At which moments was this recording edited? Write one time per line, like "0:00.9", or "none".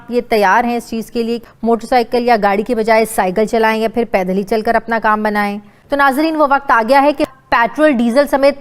0:01.4
0:05.7
0:07.2